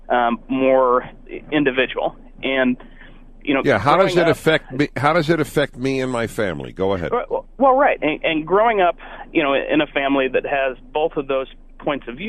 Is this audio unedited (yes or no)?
yes